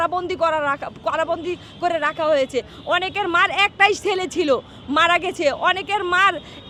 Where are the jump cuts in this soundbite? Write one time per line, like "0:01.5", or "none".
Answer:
none